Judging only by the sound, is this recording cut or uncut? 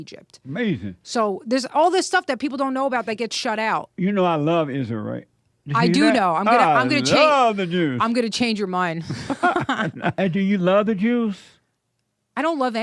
cut